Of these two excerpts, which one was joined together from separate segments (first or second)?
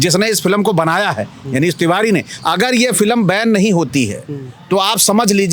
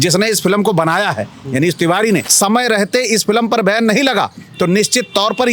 second